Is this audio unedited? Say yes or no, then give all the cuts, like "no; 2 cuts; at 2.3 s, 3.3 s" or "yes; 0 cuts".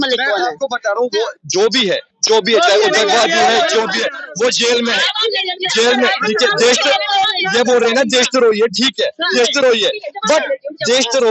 yes; 0 cuts